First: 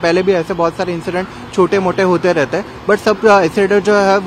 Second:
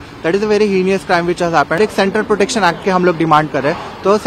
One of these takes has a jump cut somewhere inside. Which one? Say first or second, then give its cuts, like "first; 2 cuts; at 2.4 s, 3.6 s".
second; 1 cut; at 1.8 s